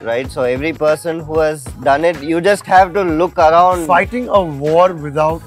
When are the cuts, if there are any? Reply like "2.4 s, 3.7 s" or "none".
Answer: none